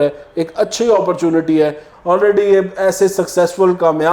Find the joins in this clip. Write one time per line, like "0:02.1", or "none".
0:01.9